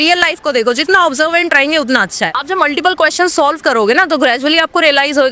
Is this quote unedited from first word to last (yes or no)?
no